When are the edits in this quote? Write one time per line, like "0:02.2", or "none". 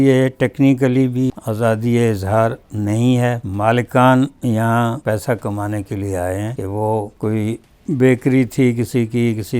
0:01.3
0:03.5
0:05.0
0:06.7